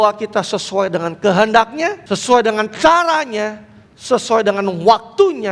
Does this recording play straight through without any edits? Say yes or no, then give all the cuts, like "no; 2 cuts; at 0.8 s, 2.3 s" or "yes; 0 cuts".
no; 1 cut; at 2.0 s